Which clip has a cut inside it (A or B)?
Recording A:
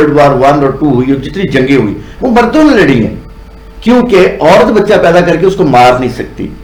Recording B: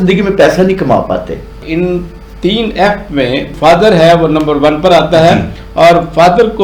B